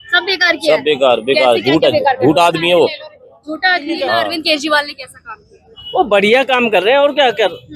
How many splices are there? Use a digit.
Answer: 1